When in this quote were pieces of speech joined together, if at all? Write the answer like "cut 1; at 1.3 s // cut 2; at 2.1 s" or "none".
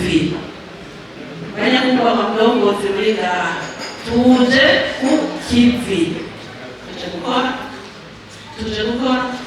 cut 1; at 6.8 s